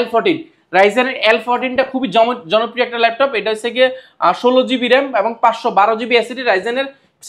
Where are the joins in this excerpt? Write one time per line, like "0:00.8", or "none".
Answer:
none